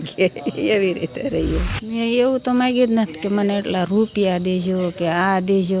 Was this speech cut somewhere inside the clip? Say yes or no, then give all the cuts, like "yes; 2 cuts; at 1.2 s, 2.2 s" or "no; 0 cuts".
yes; 1 cut; at 1.8 s